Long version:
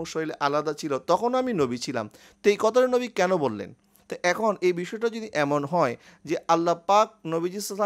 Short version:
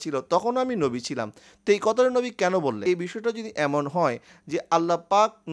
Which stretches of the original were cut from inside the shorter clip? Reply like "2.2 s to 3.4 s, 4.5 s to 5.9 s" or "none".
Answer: 3.6 s to 4.6 s